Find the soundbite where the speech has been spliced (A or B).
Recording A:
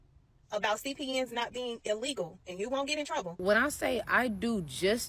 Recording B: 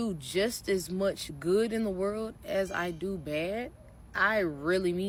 A